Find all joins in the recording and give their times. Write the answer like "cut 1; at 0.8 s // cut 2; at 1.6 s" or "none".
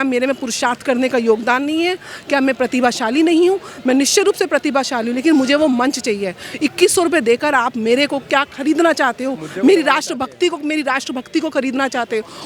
none